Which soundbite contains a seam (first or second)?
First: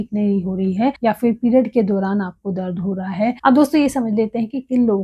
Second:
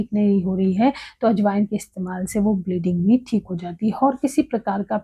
first